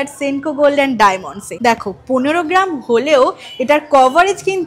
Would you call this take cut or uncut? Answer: uncut